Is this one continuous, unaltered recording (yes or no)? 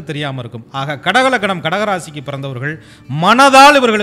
yes